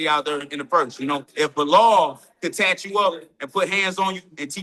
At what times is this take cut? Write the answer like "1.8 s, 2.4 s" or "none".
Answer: 1.3 s